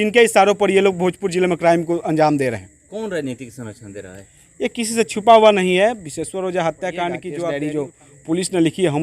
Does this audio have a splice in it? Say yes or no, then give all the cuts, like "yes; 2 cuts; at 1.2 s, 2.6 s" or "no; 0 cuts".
yes; 1 cut; at 7.3 s